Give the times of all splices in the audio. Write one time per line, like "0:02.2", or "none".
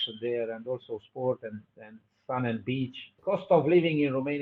0:03.2